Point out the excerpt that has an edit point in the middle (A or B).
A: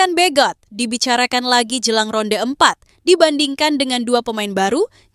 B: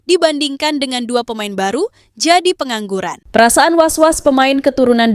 B